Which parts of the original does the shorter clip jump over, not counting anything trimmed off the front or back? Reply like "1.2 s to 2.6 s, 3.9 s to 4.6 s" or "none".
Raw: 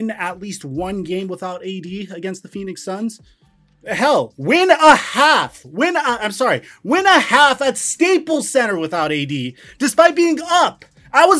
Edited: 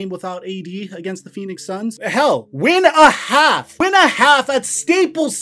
3.2 s to 3.8 s, 5.5 s to 6.8 s